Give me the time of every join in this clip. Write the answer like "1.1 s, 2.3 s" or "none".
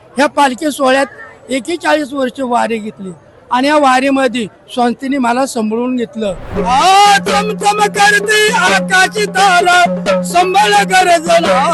6.5 s

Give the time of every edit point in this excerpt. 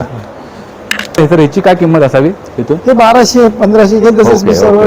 1.2 s

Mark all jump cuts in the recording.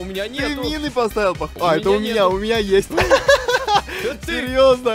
none

